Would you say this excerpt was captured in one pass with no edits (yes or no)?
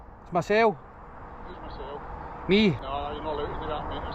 no